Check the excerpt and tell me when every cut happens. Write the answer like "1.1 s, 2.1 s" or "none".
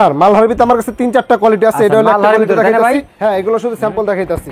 3.1 s